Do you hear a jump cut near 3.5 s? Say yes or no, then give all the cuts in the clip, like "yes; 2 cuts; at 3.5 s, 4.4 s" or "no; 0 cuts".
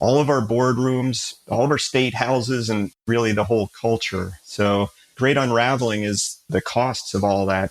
no; 0 cuts